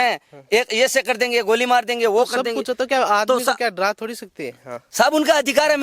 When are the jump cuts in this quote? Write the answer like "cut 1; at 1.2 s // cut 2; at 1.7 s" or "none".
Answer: none